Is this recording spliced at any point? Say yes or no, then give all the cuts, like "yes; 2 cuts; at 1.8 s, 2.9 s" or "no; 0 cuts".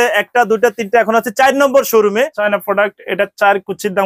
yes; 1 cut; at 2.4 s